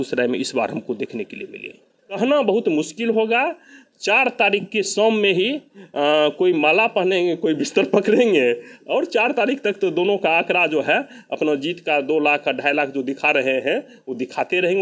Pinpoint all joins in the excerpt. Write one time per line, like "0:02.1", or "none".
0:02.2

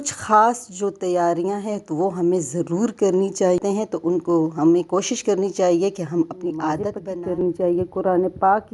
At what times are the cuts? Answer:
0:03.6
0:07.0

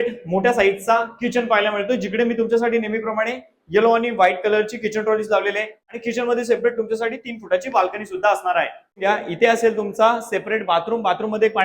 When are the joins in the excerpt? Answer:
0:05.8
0:09.0

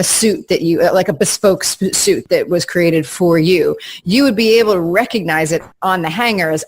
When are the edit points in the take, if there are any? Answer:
0:02.2
0:05.7

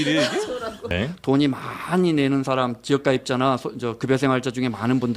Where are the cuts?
0:00.9

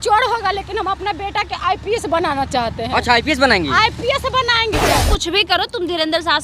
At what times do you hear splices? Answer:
0:05.0

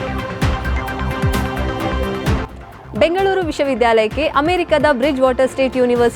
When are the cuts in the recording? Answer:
0:02.5

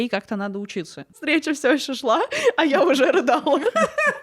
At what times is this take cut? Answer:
0:01.2

